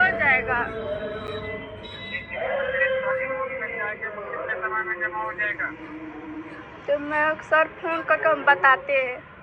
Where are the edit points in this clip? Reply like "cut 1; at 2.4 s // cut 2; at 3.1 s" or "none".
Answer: none